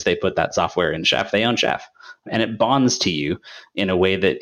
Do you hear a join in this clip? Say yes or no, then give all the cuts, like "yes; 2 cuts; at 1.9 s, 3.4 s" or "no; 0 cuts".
yes; 1 cut; at 2.2 s